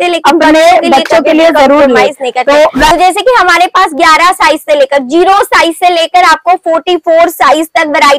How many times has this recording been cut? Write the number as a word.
one